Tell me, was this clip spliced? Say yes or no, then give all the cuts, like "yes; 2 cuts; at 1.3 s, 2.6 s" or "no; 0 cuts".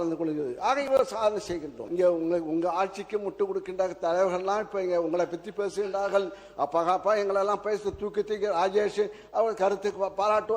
yes; 1 cut; at 1.8 s